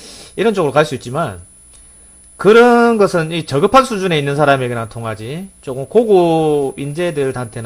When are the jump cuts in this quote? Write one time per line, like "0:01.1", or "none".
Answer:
0:03.0